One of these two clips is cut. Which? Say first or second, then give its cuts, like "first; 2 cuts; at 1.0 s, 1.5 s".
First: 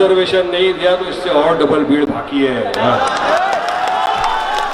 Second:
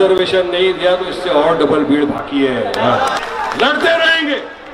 second; 1 cut; at 3.2 s